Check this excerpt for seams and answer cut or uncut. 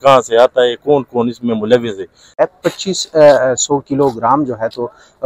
cut